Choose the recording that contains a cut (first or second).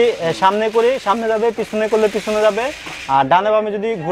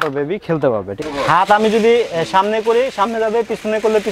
second